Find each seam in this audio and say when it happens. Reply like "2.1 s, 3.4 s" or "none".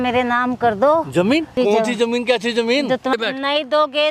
1.6 s, 3.1 s